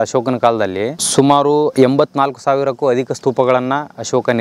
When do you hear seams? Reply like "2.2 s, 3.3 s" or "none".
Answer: 1.0 s

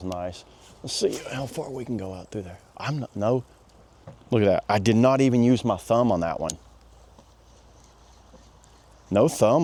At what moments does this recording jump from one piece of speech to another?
none

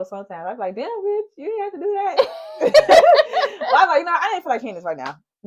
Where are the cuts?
none

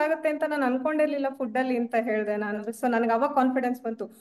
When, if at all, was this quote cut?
2.6 s

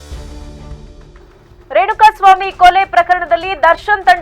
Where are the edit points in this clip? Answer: 1.2 s

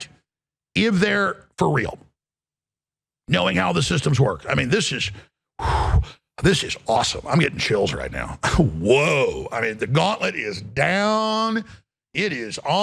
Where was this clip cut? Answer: none

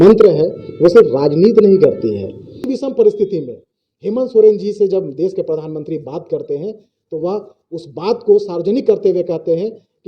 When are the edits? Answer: 2.7 s

